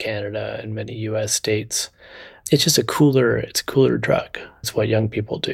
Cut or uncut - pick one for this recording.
cut